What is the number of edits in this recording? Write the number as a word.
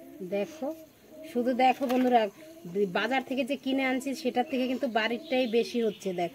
zero